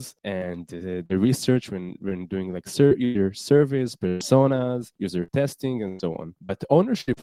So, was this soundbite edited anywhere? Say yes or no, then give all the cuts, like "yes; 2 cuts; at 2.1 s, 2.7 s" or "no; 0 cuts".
no; 0 cuts